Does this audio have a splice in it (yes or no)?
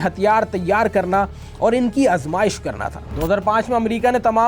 yes